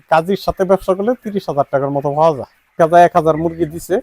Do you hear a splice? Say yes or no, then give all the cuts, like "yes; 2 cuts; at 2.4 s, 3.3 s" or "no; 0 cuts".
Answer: yes; 1 cut; at 2.8 s